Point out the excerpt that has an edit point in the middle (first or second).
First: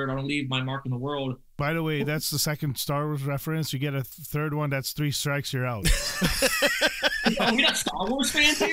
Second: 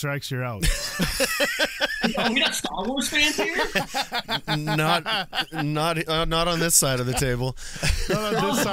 first